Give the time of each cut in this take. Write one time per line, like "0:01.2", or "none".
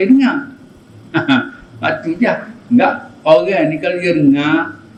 none